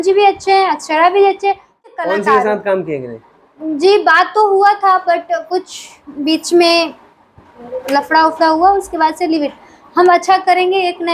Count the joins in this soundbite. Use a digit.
1